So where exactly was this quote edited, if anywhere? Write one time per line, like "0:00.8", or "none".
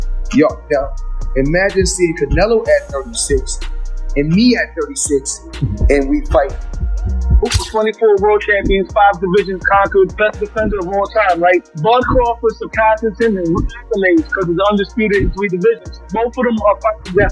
0:07.4